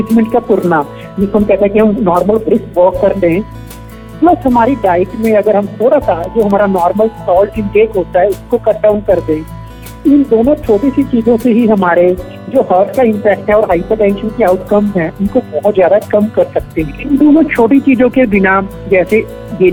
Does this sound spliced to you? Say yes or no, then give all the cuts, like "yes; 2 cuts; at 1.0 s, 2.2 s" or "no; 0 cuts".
no; 0 cuts